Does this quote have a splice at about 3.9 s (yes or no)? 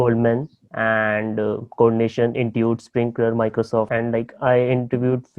yes